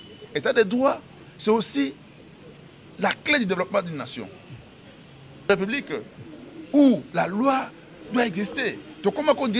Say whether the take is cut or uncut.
cut